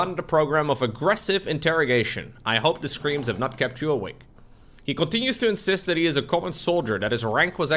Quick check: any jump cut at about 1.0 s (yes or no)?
yes